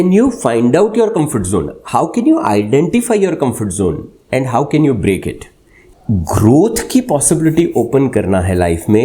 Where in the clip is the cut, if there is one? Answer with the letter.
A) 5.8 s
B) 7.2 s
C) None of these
A